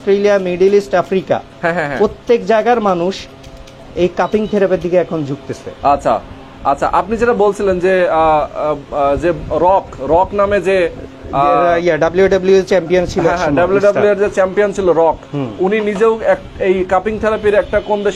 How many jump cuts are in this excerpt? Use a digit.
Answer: 0